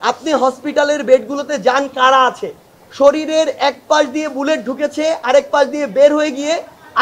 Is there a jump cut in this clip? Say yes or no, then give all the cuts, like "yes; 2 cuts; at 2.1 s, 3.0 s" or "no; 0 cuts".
no; 0 cuts